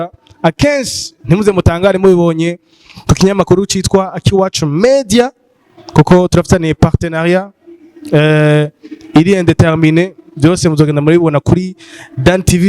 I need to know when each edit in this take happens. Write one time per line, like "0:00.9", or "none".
none